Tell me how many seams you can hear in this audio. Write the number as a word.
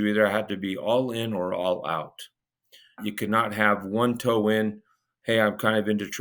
one